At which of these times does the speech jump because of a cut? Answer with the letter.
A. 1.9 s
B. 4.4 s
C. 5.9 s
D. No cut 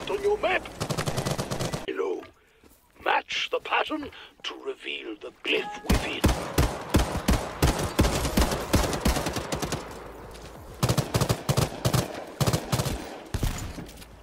A